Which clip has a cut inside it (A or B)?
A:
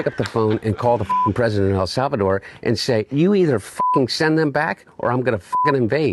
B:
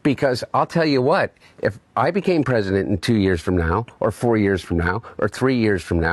A